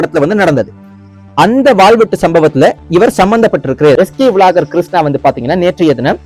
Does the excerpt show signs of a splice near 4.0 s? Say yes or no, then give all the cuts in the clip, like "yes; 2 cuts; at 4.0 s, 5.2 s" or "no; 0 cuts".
yes; 1 cut; at 4.0 s